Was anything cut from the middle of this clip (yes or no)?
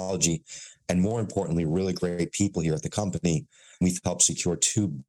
yes